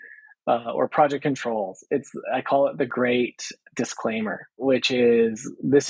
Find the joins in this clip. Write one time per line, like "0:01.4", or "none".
0:02.9
0:04.5